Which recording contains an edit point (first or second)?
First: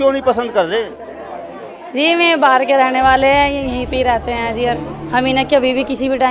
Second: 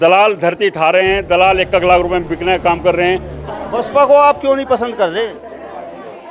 second